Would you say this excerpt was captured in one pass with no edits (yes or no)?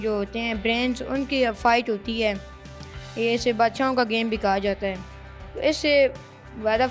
yes